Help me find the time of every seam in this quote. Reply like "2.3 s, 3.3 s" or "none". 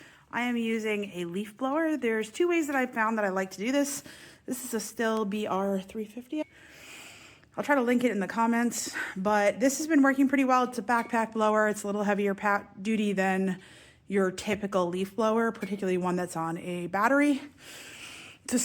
6.4 s